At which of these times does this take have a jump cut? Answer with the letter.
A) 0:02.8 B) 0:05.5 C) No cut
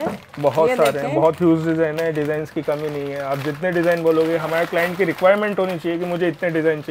C